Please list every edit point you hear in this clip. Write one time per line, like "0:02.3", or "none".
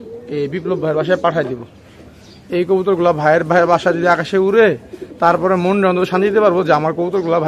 none